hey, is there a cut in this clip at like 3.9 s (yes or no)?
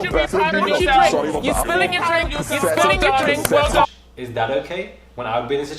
yes